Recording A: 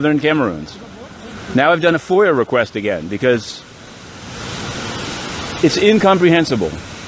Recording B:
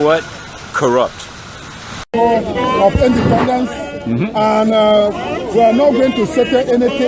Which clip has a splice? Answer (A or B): B